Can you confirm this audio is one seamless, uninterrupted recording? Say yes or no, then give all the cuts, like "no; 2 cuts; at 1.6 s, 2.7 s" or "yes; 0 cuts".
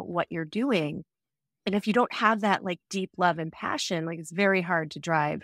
yes; 0 cuts